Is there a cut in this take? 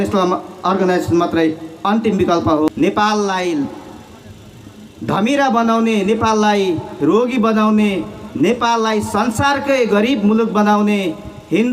yes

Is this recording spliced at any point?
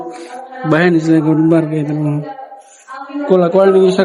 no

